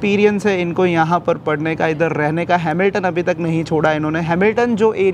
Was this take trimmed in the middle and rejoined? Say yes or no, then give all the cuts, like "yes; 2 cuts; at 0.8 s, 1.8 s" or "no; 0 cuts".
no; 0 cuts